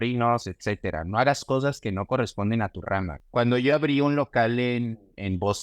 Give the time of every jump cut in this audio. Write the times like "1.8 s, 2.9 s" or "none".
3.2 s